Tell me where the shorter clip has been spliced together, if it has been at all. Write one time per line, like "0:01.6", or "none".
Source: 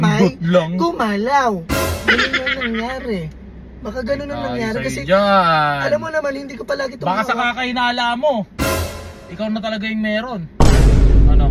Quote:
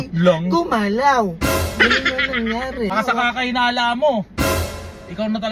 0:02.9